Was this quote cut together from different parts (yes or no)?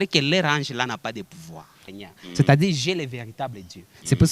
yes